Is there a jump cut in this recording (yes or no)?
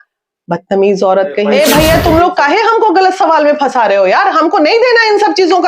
yes